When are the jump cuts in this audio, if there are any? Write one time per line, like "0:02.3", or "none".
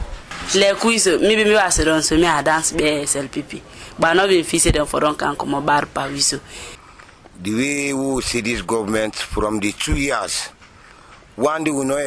0:06.7